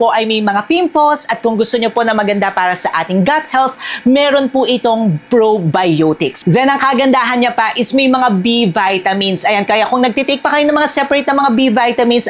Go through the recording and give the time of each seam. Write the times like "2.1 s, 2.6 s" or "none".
none